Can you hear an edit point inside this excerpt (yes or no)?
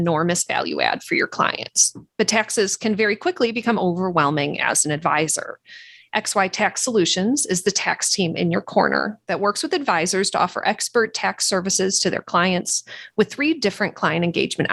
no